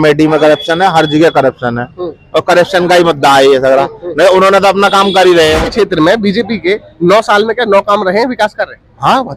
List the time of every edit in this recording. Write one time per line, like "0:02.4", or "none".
0:05.7